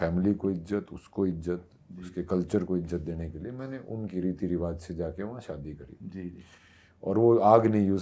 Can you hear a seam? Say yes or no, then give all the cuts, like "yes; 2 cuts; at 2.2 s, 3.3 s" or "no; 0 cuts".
no; 0 cuts